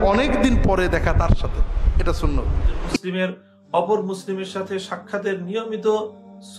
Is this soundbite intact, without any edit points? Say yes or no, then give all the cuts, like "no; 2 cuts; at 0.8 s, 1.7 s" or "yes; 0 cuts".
no; 1 cut; at 3.0 s